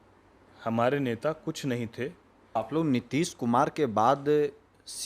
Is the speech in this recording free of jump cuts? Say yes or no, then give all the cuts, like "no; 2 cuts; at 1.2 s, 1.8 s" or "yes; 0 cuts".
no; 1 cut; at 2.6 s